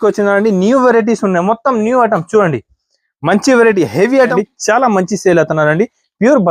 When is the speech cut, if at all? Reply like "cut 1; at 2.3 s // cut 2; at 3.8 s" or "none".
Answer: cut 1; at 4.3 s